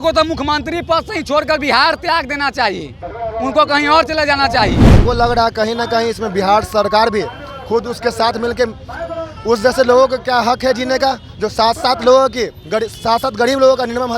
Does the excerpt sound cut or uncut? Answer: cut